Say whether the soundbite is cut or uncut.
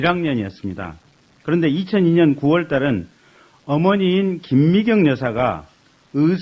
uncut